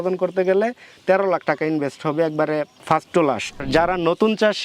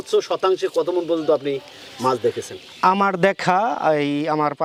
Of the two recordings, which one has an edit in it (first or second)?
first